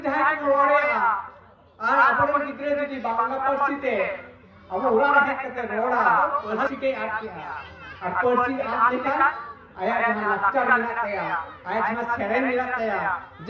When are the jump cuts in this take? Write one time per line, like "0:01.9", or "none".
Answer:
0:06.5